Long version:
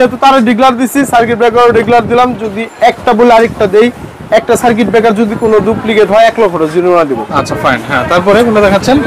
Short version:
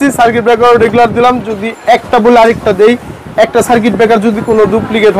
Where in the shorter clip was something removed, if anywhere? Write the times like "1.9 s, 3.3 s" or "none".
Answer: none